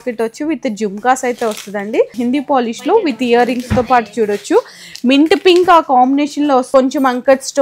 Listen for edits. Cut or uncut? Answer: cut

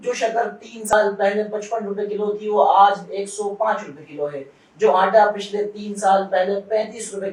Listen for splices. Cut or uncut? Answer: cut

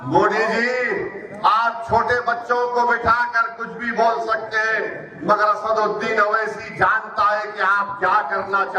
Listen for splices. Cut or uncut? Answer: uncut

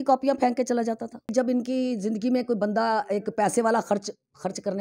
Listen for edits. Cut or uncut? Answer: cut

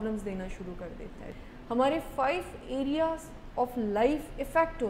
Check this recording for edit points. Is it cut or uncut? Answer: cut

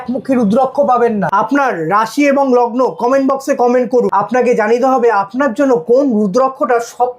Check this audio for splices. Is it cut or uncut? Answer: cut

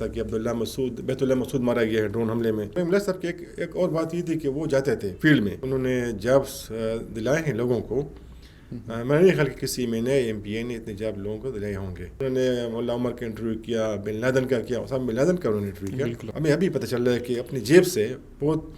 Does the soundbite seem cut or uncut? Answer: cut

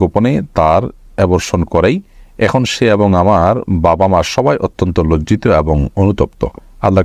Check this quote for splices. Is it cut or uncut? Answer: uncut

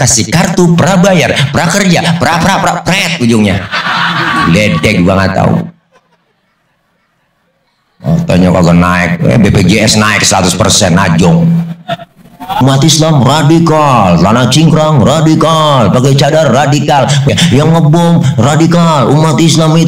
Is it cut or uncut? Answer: cut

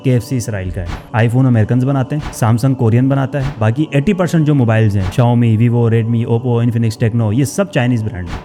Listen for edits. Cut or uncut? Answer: uncut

